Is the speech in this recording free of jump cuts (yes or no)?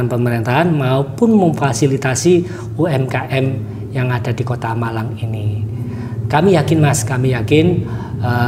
yes